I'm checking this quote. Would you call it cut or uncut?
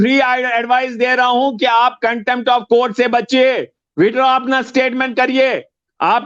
uncut